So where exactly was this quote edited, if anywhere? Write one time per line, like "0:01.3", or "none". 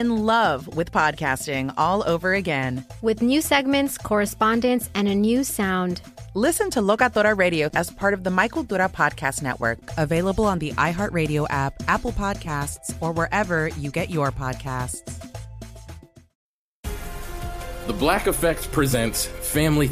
0:16.2